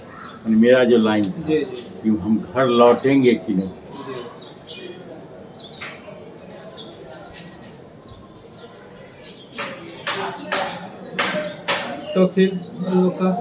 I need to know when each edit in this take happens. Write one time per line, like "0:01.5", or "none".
none

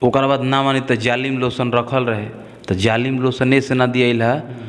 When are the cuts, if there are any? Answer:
none

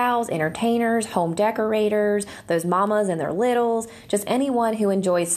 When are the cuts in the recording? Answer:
none

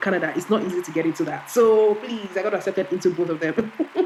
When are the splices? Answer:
none

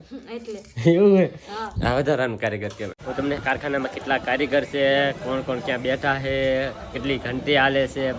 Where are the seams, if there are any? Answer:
0:03.0

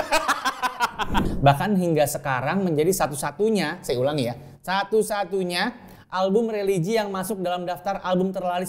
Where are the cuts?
0:01.3

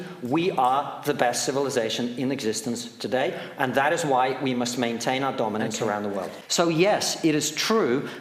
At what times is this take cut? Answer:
0:06.3

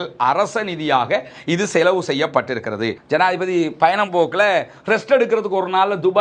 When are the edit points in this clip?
0:03.0

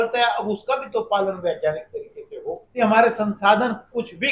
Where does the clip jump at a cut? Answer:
0:02.8

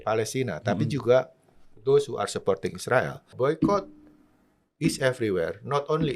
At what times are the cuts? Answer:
0:03.3

